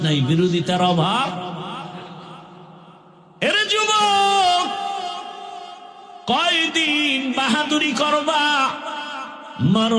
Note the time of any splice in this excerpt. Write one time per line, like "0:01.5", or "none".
0:09.1